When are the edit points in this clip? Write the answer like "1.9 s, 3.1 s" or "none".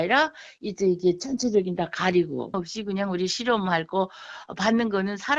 none